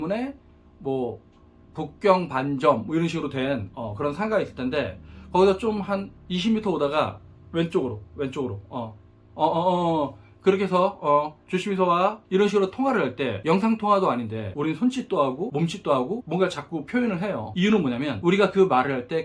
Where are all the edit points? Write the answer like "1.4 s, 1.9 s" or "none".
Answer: 12.2 s, 13.3 s, 14.4 s, 17.5 s, 18.1 s